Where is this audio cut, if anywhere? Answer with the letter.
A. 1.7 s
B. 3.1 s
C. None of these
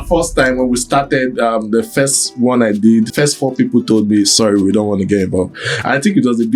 B